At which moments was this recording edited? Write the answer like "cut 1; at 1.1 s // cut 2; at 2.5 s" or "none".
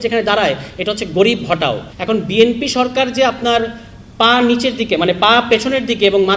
cut 1; at 1.9 s